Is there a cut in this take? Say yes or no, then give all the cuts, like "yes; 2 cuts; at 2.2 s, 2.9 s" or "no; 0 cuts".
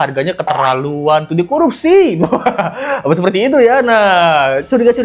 no; 0 cuts